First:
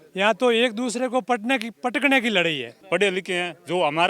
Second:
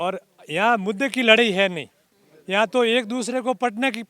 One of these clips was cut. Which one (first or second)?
first